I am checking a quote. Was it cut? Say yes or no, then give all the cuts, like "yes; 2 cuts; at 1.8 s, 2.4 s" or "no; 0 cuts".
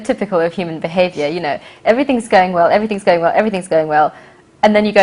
no; 0 cuts